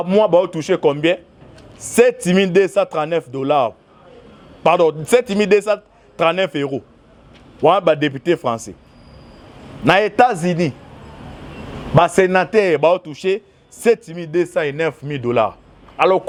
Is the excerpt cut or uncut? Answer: uncut